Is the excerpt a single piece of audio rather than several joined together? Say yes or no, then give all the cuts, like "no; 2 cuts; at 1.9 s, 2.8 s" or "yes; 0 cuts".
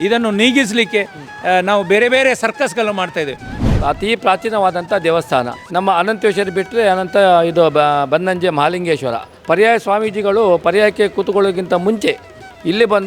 no; 3 cuts; at 3.5 s, 5.6 s, 9.3 s